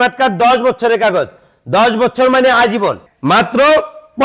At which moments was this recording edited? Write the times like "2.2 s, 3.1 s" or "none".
3.1 s